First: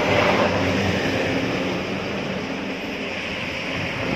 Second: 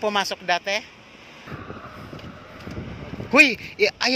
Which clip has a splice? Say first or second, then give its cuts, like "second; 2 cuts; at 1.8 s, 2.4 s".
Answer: second; 1 cut; at 1.5 s